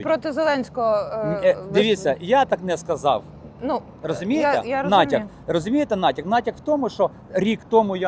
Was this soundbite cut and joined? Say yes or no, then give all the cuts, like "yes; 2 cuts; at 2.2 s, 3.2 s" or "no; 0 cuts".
no; 0 cuts